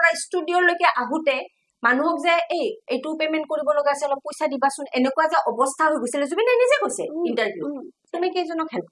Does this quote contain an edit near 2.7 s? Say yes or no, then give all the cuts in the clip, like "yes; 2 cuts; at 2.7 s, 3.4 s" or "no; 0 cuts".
no; 1 cut; at 8.0 s